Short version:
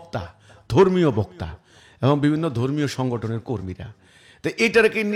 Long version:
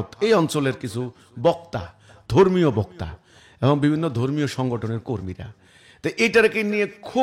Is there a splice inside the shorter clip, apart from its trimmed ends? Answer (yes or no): no